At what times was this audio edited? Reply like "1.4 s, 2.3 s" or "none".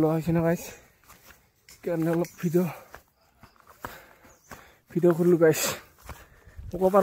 none